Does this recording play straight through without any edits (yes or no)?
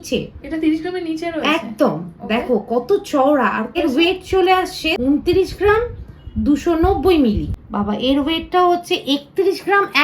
no